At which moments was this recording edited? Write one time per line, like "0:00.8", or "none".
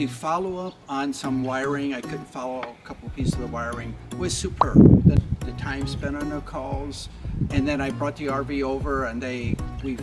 0:05.1